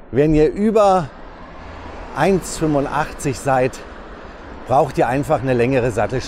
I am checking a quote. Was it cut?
no; 0 cuts

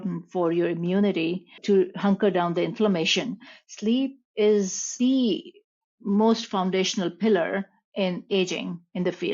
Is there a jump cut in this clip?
yes; 2 cuts; at 1.5 s, 4.9 s

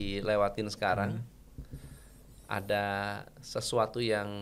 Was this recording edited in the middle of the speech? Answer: no; 0 cuts

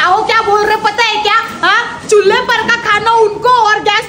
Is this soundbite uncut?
yes; 0 cuts

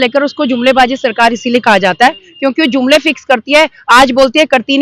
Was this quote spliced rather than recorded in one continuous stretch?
no; 0 cuts

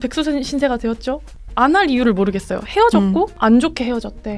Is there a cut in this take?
yes; 2 cuts; at 1.4 s, 3.3 s

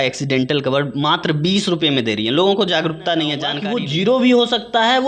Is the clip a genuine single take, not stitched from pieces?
no; 1 cut; at 3.6 s

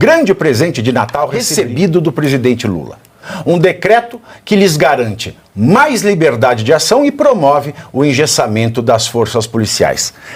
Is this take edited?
yes; 1 cut; at 1.4 s

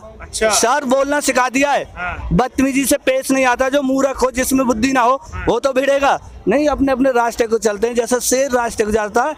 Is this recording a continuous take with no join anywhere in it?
yes; 0 cuts

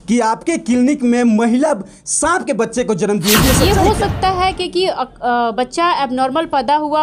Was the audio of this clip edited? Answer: yes; 1 cut; at 3.6 s

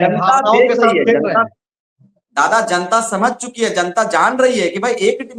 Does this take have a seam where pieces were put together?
no; 0 cuts

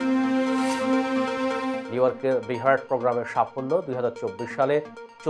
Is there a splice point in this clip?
yes; 1 cut; at 1.8 s

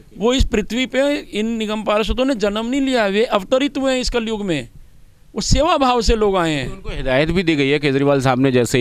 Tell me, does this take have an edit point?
no; 0 cuts

